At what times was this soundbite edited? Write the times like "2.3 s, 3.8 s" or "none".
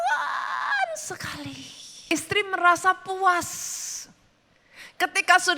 2.1 s